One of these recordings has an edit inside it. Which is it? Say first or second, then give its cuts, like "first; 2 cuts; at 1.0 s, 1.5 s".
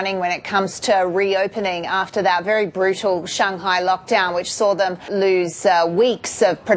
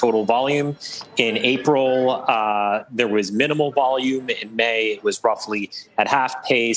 first; 1 cut; at 5.1 s